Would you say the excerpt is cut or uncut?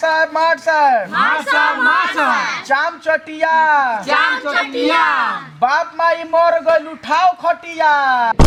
uncut